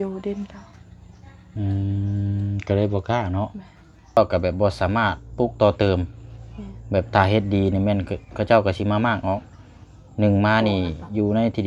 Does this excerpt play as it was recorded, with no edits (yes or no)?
no